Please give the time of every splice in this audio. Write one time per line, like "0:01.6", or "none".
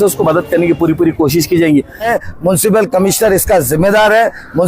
0:02.1